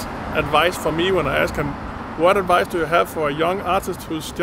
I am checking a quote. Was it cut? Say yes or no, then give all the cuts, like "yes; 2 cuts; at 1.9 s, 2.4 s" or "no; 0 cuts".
no; 0 cuts